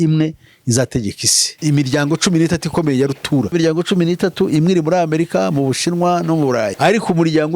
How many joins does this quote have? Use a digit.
3